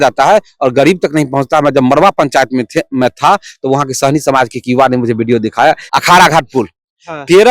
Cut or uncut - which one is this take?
cut